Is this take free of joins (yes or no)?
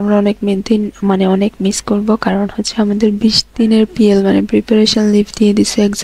yes